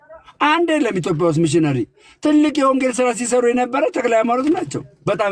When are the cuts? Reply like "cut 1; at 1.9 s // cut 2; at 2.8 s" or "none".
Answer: none